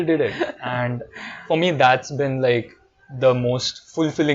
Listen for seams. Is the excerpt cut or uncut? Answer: uncut